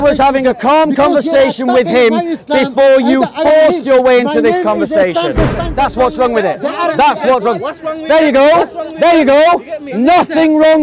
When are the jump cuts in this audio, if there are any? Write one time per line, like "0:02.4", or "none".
0:05.6